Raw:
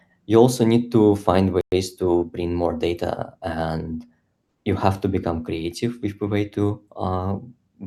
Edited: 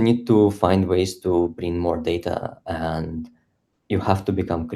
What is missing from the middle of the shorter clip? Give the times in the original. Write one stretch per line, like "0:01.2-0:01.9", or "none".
0:01.6-0:01.7